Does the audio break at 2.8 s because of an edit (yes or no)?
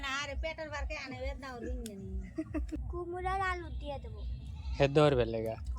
yes